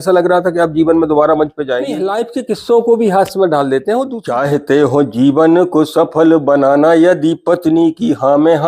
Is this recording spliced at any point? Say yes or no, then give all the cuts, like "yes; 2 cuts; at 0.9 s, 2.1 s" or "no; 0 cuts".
yes; 2 cuts; at 2.0 s, 4.2 s